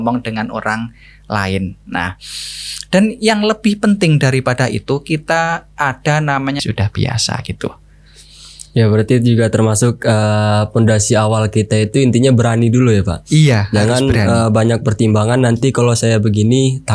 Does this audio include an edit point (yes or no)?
yes